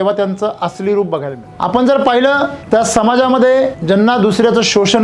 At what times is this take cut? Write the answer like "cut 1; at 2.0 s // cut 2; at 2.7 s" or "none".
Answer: cut 1; at 1.4 s // cut 2; at 2.6 s // cut 3; at 3.8 s